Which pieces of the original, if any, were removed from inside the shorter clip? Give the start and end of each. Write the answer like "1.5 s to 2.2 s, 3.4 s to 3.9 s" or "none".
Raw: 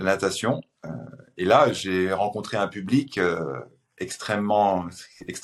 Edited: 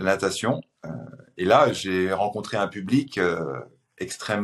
none

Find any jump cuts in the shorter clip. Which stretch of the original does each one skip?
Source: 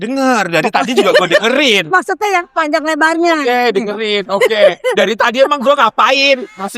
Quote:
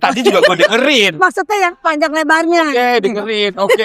none

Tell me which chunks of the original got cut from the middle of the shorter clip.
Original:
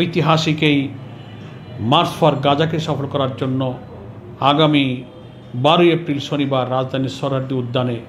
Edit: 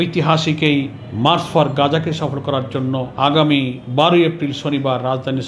1.0 s to 1.7 s, 3.8 s to 4.3 s, 5.0 s to 5.5 s

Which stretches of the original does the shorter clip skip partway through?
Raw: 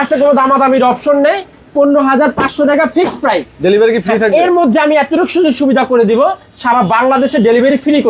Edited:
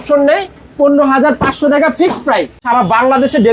3.5 s to 6.5 s

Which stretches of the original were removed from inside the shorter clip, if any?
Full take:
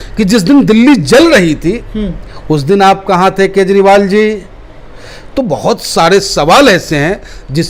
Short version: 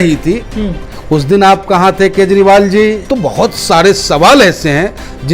4.4 s to 5.3 s

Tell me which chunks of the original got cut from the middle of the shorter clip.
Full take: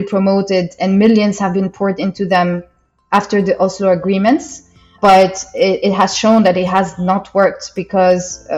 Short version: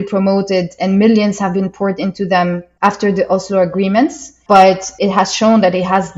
2.7 s to 3.0 s, 4.6 s to 4.8 s, 5.5 s to 5.8 s

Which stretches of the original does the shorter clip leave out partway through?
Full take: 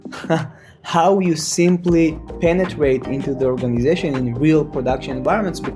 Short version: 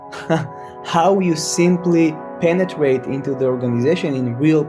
none

